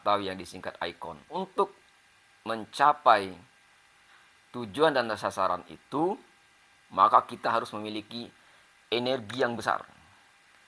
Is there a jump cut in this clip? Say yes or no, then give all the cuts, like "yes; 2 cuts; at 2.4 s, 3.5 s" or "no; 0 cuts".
yes; 1 cut; at 1.4 s